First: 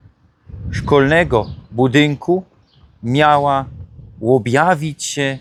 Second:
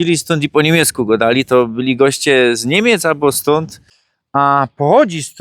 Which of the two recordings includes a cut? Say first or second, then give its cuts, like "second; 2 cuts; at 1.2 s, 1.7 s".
second; 1 cut; at 3.8 s